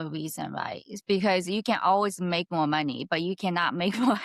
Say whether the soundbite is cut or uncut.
uncut